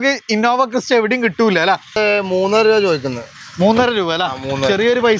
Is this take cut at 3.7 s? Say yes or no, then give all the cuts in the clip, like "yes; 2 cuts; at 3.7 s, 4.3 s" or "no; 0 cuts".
no; 1 cut; at 2.0 s